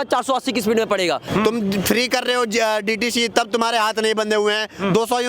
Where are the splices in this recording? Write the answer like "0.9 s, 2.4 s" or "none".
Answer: 1.2 s